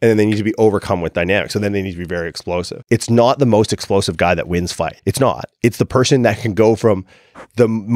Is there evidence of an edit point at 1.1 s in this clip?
no; 2 cuts; at 2.8 s, 5.0 s

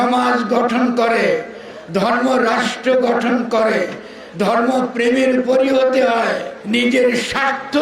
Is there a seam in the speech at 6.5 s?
yes; 1 cut; at 6.5 s

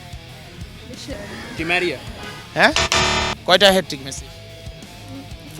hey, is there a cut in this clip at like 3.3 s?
yes; 1 cut; at 3.3 s

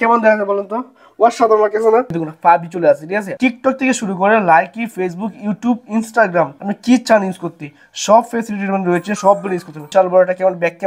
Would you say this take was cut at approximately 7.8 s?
no; 3 cuts; at 2.1 s, 3.3 s, 9.9 s

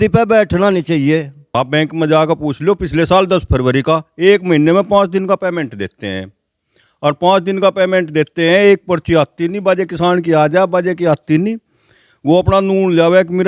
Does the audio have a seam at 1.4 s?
yes; 1 cut; at 1.4 s

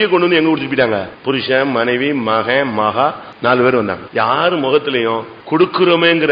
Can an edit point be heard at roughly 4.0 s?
yes; 4 cuts; at 1.1 s, 3.3 s, 4.0 s, 5.3 s

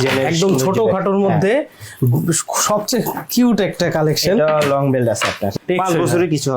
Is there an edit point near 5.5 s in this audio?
yes; 1 cut; at 5.5 s

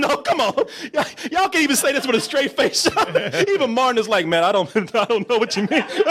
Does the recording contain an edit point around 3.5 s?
no; 0 cuts

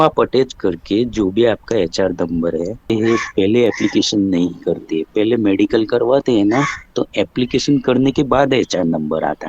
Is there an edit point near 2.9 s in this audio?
yes; 1 cut; at 2.9 s

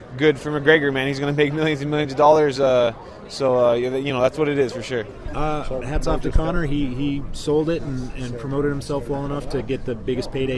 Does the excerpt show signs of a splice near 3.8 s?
no; 1 cut; at 6.3 s

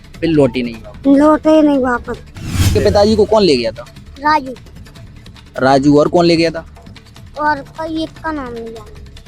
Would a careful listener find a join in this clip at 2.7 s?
yes; 1 cut; at 2.7 s

